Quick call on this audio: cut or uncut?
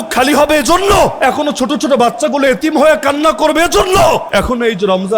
cut